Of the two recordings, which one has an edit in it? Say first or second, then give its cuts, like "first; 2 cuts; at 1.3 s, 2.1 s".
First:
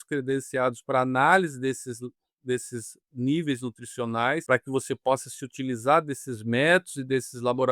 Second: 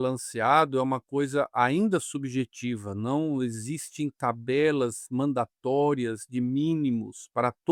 first; 1 cut; at 4.4 s